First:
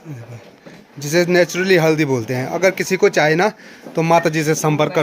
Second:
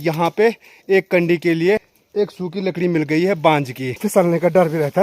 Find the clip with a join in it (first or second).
second